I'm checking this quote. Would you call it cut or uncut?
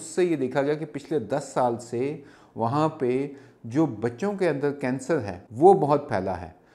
cut